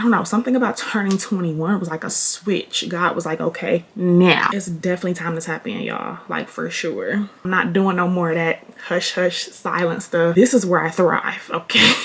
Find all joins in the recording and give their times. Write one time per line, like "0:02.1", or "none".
0:04.6
0:07.4